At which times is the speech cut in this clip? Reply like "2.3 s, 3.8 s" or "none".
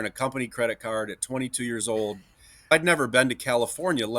2.7 s

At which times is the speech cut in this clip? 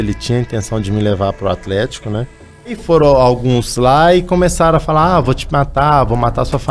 2.8 s

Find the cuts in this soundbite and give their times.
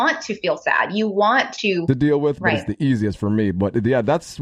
1.8 s

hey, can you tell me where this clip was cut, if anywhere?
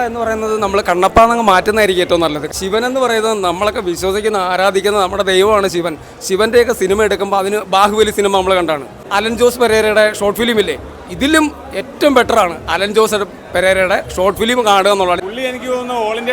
2.4 s, 9.0 s, 15.2 s

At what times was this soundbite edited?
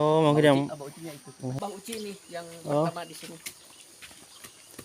1.6 s

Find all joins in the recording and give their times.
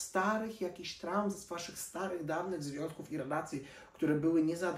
none

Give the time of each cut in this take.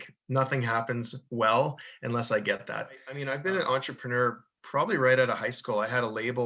3.1 s

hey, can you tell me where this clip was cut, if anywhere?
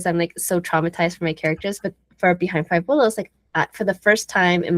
none

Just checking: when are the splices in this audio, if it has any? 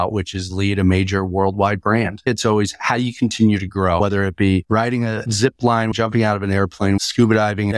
2.3 s, 4.0 s, 5.9 s, 7.0 s

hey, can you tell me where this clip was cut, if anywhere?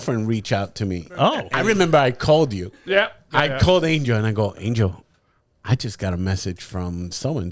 1.5 s

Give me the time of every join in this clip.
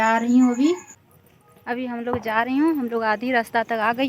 0.9 s

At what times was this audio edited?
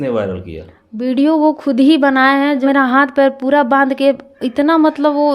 2.6 s

